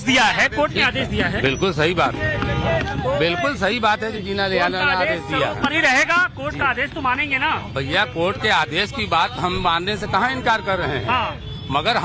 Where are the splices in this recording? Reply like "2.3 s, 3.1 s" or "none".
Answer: 1.3 s